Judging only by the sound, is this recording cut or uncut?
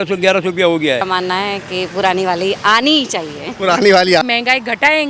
cut